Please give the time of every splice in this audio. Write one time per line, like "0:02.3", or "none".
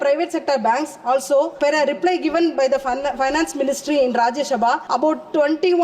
0:01.5
0:04.8